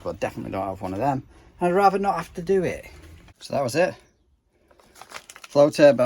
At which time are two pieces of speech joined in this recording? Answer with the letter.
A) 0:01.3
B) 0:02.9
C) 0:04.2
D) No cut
B